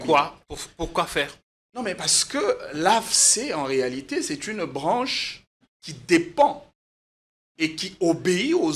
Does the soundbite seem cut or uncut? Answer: uncut